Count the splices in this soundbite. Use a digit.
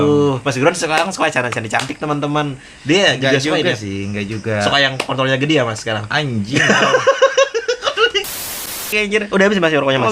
1